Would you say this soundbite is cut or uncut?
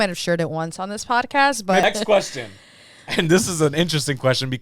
cut